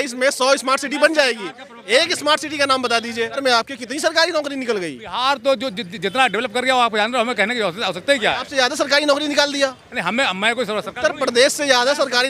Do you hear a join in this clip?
yes; 1 cut; at 3.4 s

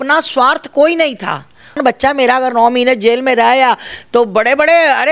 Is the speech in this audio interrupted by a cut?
yes; 1 cut; at 1.8 s

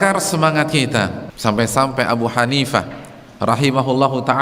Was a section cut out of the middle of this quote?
yes; 1 cut; at 1.3 s

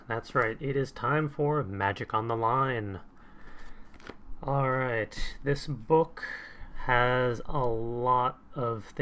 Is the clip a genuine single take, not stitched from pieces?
no; 1 cut; at 6.8 s

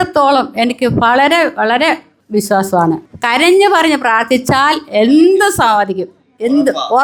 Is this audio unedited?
yes; 0 cuts

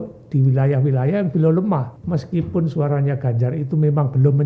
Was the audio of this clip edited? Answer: yes; 1 cut; at 1.9 s

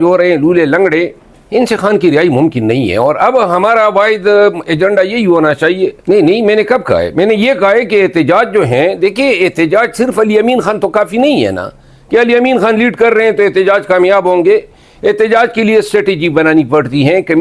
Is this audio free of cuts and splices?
yes; 0 cuts

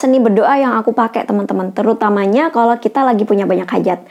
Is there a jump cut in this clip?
no; 0 cuts

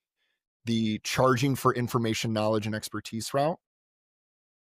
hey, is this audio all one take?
yes; 0 cuts

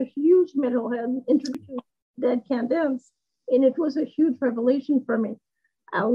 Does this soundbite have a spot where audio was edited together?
yes; 1 cut; at 1.6 s

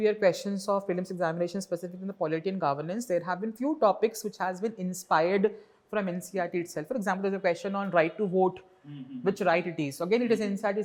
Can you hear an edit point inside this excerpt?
no; 0 cuts

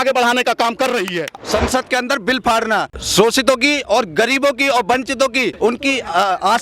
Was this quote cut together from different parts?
yes; 3 cuts; at 1.2 s, 3.0 s, 5.5 s

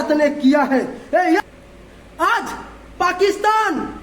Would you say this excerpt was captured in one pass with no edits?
no; 1 cut; at 1.4 s

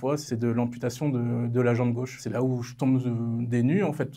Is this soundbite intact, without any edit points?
no; 1 cut; at 2.2 s

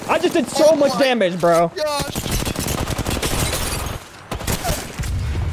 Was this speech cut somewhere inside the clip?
no; 0 cuts

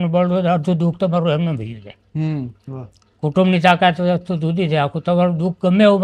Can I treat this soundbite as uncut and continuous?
yes; 0 cuts

